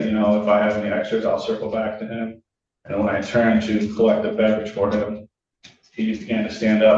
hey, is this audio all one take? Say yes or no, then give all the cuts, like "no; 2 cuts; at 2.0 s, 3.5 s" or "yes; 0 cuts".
yes; 0 cuts